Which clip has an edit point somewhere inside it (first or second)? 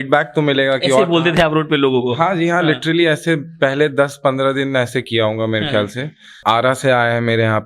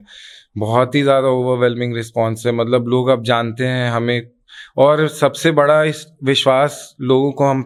first